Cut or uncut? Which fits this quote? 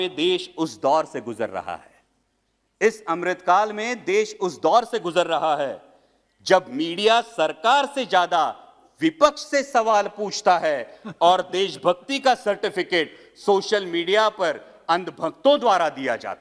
uncut